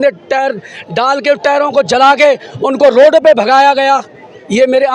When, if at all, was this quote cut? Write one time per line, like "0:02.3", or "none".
none

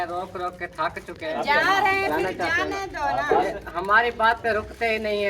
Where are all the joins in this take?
0:01.3

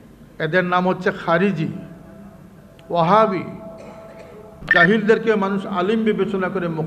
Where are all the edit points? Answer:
0:04.7

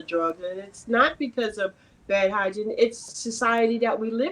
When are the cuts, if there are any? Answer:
0:03.2

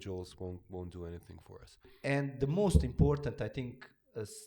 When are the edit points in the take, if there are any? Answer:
0:01.9

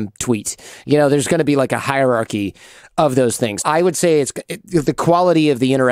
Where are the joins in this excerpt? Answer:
0:03.6

